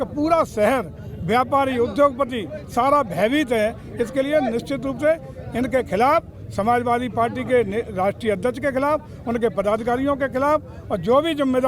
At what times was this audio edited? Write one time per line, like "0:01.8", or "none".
none